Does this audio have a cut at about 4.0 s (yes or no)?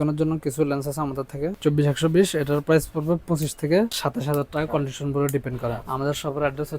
yes